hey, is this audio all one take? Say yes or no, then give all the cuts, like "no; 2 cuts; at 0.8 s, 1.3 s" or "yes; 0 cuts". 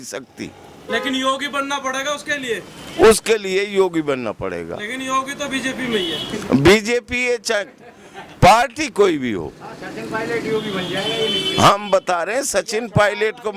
yes; 0 cuts